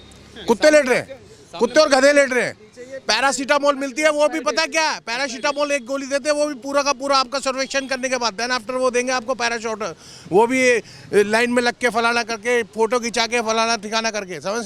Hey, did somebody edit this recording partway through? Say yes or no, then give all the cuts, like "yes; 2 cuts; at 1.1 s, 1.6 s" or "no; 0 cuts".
no; 0 cuts